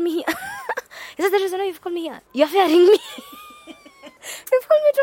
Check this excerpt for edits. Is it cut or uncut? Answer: uncut